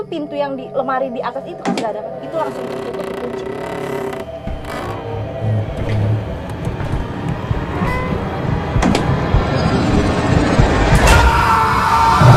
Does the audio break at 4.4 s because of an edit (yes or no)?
no